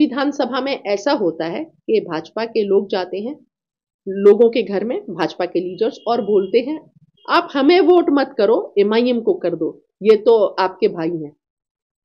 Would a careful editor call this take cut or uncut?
uncut